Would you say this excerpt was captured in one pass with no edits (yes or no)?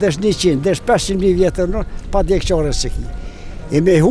yes